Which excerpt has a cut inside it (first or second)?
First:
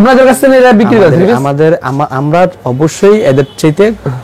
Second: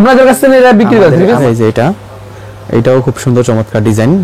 second